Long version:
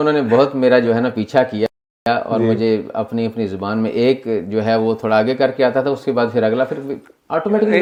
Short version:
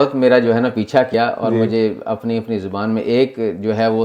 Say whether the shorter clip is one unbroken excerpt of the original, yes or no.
no